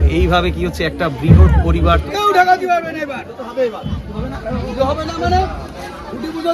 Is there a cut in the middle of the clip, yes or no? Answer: yes